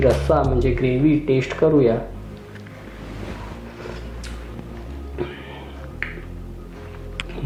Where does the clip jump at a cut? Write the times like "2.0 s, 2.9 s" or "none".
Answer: none